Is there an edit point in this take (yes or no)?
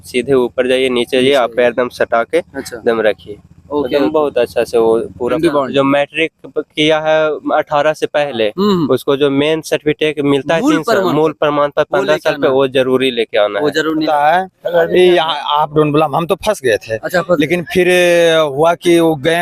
yes